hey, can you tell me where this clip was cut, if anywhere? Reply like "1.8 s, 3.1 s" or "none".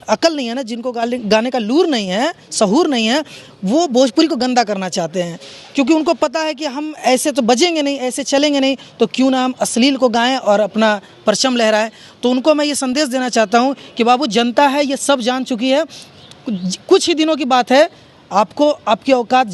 none